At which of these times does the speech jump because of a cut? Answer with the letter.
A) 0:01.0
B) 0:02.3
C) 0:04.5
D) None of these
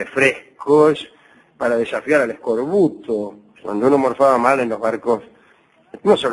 C